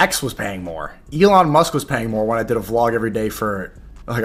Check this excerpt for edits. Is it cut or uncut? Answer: uncut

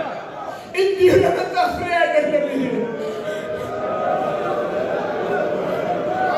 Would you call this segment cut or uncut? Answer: uncut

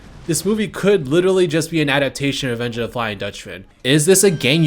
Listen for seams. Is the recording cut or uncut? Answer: cut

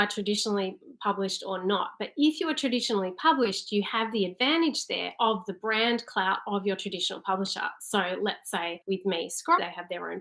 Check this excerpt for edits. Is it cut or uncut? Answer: uncut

